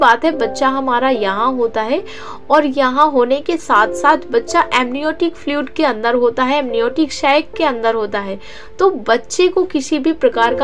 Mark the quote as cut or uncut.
uncut